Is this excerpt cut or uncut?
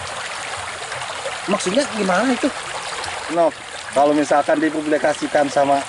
cut